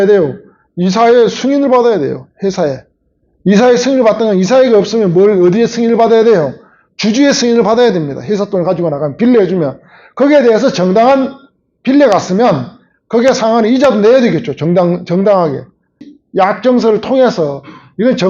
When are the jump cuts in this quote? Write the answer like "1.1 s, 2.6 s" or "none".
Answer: 16.2 s

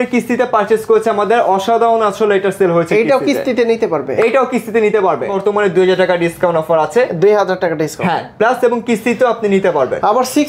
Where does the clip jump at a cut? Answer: 5.3 s

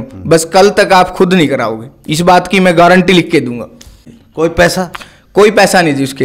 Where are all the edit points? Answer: 4.2 s

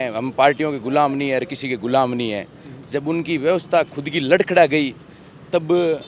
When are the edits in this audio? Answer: none

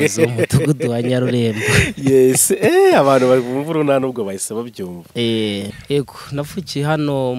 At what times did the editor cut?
5.7 s

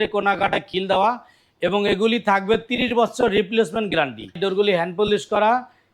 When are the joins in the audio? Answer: 4.4 s

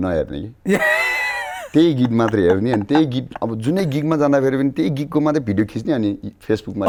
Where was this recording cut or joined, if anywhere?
none

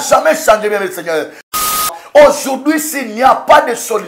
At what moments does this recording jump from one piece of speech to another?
1.8 s

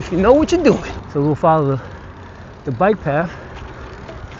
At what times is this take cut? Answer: 0.9 s

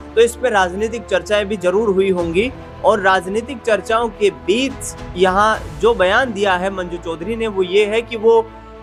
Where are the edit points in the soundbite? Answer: none

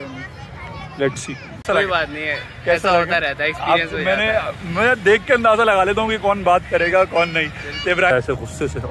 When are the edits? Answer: 1.6 s, 8.1 s

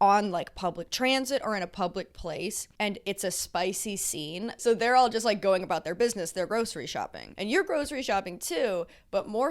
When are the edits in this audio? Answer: 4.6 s, 7.2 s

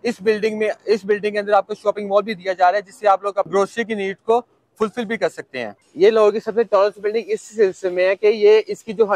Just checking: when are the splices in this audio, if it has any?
3.5 s, 5.8 s

